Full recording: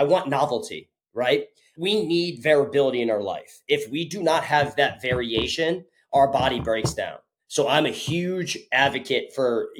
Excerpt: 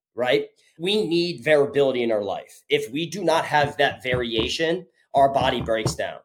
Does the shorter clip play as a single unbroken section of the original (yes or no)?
yes